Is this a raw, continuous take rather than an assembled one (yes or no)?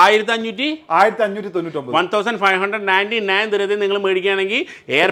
yes